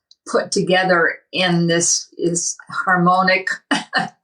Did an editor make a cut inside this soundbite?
no; 0 cuts

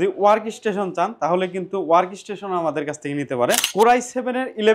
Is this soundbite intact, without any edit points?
no; 1 cut; at 3.7 s

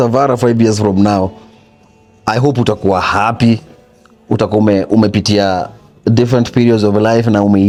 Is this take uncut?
yes; 0 cuts

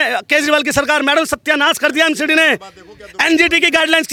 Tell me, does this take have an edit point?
no; 0 cuts

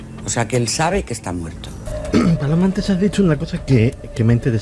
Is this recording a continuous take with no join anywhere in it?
no; 1 cut; at 1.9 s

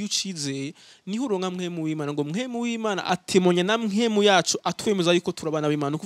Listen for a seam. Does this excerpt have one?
no; 0 cuts

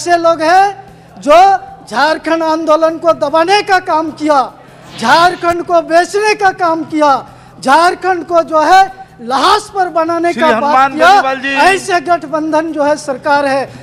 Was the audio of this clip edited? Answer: no; 0 cuts

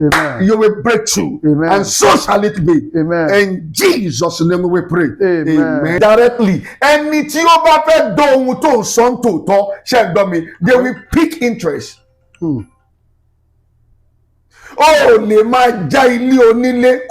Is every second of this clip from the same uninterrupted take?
no; 1 cut; at 6.0 s

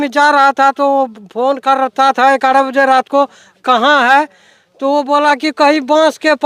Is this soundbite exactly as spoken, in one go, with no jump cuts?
yes; 0 cuts

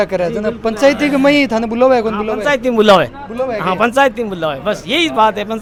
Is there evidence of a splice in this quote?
no; 0 cuts

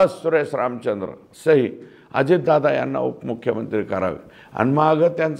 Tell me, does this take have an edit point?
no; 0 cuts

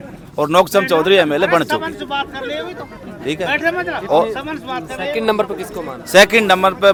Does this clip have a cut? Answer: no; 0 cuts

